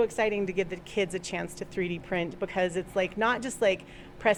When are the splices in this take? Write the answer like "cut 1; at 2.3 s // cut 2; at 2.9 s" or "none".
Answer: none